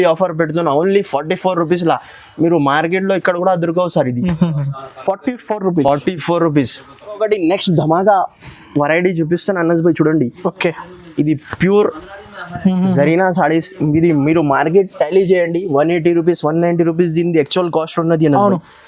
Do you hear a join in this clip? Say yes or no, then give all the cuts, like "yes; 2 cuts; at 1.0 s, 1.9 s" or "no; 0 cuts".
no; 0 cuts